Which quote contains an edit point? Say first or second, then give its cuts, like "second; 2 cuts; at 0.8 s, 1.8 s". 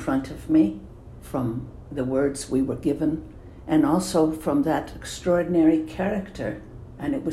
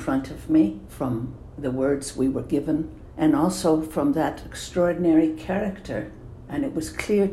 second; 2 cuts; at 0.9 s, 3.0 s